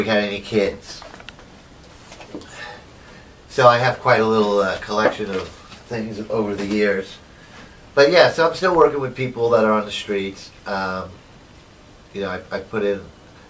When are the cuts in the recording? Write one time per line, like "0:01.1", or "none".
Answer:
0:09.7

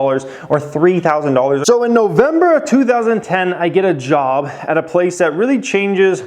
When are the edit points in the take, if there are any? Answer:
0:01.6

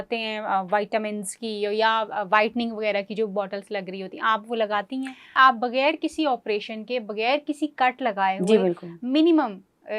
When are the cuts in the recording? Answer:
0:05.3

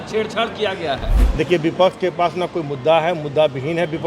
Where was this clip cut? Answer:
0:01.2

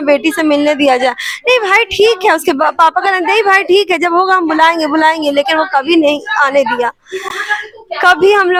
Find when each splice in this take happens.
none

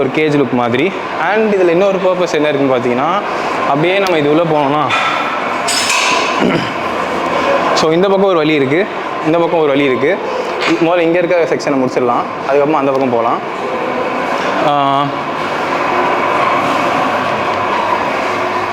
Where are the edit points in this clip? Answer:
none

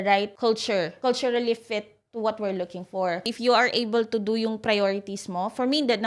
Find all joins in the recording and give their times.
0:03.2

